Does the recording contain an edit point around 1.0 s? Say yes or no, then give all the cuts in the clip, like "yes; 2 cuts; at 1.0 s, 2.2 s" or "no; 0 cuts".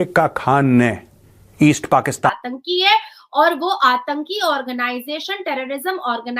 no; 1 cut; at 2.3 s